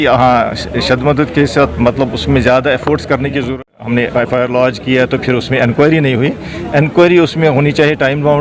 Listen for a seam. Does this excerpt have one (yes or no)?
yes